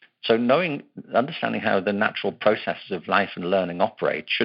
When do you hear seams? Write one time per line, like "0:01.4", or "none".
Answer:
none

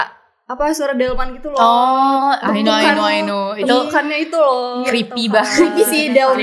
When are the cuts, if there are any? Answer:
none

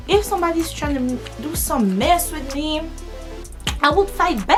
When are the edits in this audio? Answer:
none

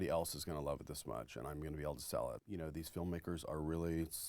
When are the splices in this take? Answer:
0:02.4

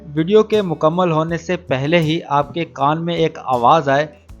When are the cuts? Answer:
none

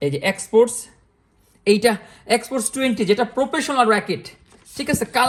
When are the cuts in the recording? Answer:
none

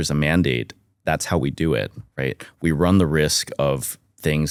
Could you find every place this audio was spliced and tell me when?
none

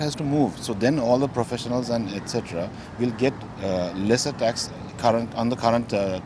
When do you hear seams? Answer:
none

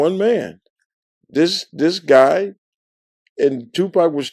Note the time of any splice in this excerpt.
none

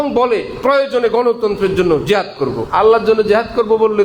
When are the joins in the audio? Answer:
0:02.6

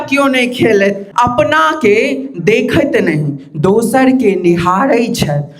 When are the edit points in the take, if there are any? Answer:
0:01.1

